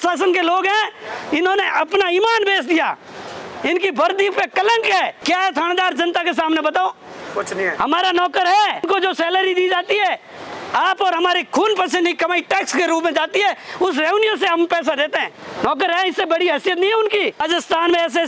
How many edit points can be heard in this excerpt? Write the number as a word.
four